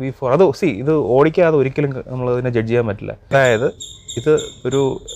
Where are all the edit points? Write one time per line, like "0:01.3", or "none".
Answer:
0:03.2